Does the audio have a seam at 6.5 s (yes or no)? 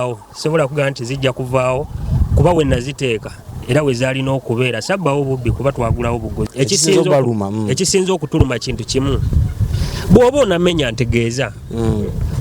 yes